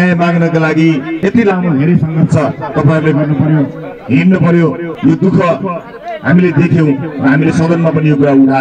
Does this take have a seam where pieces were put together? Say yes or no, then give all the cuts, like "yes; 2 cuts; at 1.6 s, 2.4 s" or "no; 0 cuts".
yes; 2 cuts; at 1.1 s, 4.9 s